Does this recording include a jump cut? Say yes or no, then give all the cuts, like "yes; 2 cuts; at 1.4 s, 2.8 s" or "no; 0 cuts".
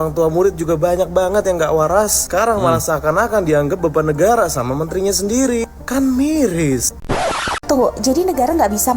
yes; 1 cut; at 7.0 s